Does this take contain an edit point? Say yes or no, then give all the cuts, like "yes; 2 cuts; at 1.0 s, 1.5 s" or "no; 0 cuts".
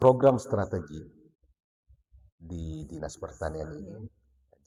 no; 0 cuts